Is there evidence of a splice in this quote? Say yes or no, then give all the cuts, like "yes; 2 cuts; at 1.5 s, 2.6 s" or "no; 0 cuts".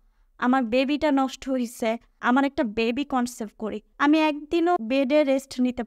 yes; 3 cuts; at 2.1 s, 3.8 s, 4.8 s